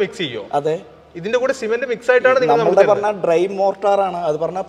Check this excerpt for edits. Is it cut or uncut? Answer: uncut